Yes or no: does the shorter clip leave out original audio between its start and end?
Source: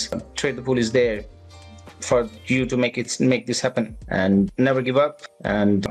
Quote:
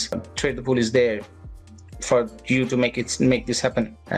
no